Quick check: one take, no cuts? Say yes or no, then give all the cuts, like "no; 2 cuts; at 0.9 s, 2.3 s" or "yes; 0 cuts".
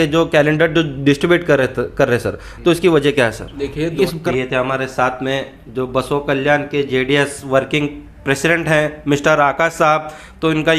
no; 1 cut; at 4.0 s